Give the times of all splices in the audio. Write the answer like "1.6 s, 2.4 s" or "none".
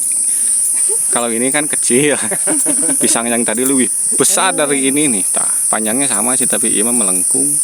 none